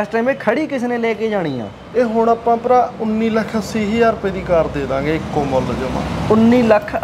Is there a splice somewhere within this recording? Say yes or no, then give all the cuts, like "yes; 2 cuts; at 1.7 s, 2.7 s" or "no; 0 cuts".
no; 0 cuts